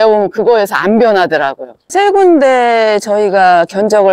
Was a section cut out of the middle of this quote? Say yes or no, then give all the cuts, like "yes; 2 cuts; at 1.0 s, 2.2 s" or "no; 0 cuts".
yes; 1 cut; at 1.9 s